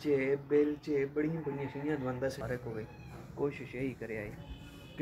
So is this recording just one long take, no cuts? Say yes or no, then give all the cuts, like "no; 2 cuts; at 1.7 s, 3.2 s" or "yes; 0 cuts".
no; 1 cut; at 2.4 s